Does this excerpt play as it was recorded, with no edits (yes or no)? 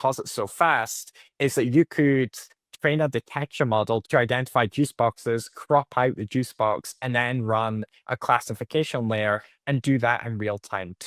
yes